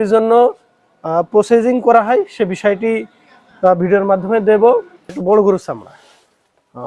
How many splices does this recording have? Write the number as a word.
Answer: one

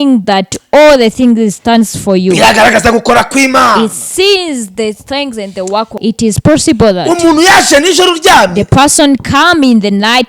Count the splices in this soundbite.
one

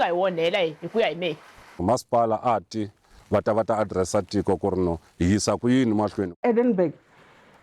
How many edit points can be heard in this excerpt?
three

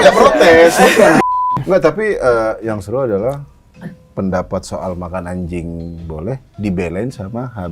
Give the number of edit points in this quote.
one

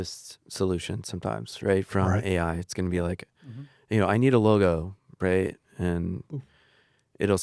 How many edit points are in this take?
zero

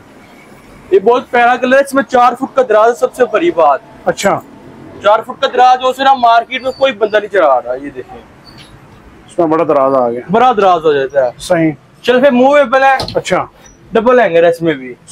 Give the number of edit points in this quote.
zero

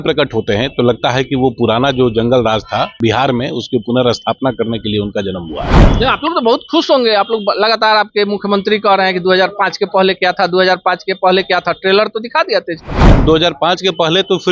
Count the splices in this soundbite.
two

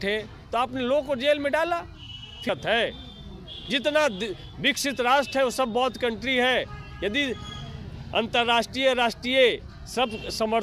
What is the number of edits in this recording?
one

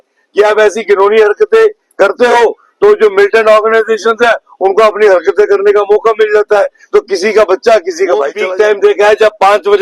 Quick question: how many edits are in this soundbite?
one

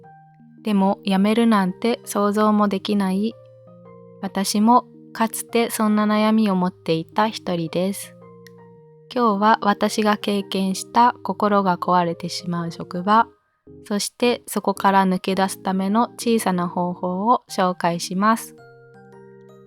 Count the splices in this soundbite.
one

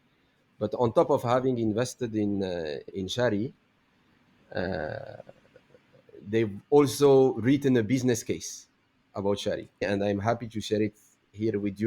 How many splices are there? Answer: two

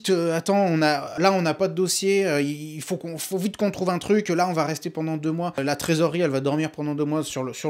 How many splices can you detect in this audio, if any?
two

